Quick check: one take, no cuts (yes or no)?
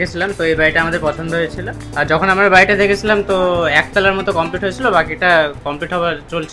yes